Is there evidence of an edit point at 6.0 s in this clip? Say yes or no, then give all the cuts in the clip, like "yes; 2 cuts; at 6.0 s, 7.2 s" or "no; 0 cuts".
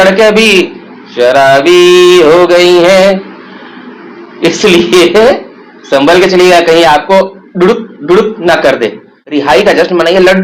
no; 1 cut; at 9.5 s